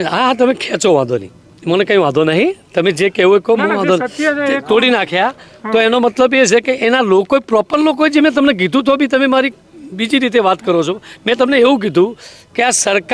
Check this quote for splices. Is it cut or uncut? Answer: uncut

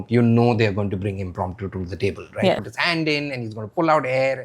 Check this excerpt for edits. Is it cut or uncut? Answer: cut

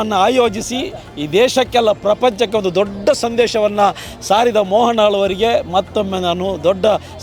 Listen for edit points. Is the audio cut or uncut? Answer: uncut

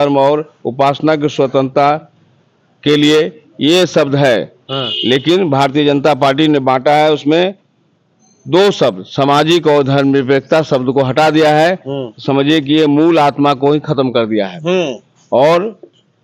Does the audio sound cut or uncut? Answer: uncut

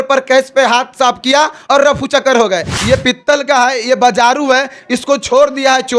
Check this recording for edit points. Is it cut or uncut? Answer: cut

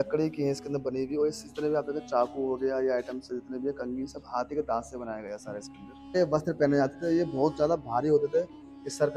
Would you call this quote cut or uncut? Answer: cut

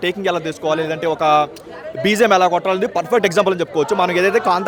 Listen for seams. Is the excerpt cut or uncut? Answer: uncut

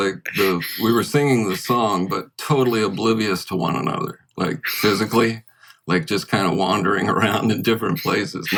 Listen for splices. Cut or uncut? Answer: uncut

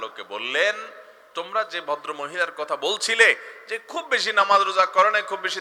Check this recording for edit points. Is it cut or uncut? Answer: uncut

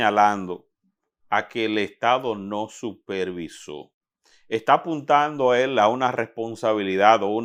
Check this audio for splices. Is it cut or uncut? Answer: uncut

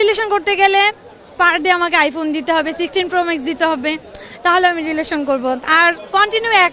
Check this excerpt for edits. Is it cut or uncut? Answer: uncut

